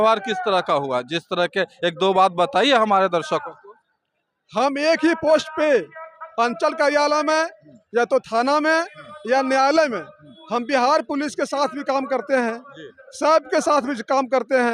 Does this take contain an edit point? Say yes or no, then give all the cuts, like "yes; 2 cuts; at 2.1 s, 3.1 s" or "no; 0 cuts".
no; 0 cuts